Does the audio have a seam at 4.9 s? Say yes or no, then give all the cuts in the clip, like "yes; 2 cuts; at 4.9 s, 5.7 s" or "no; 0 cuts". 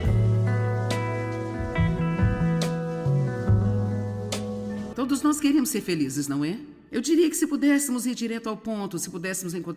yes; 1 cut; at 4.9 s